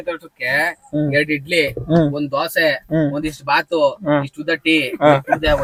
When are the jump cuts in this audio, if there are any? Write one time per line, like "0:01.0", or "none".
none

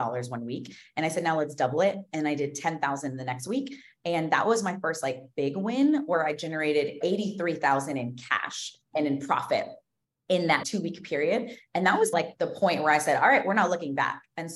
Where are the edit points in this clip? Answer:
0:07.0
0:08.8
0:10.6
0:12.2

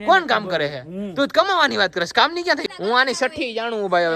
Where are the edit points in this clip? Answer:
0:02.6

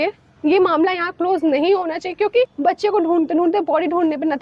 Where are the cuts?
0:02.5

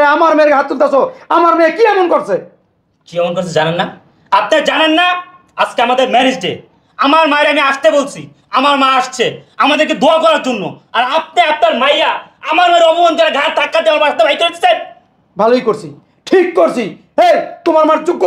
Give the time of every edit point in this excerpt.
none

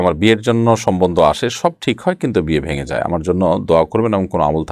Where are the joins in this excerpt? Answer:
none

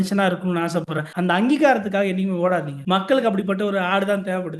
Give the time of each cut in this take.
0:01.0
0:02.7

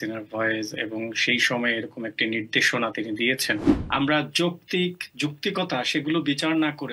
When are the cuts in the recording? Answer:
0:03.7

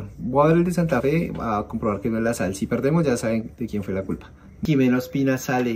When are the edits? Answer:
0:04.6

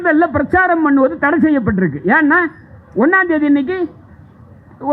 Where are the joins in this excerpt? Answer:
none

